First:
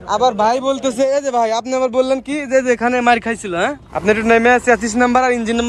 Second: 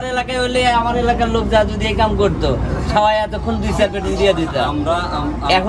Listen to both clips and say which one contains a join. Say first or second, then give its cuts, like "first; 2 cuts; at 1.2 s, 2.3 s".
first; 1 cut; at 3.9 s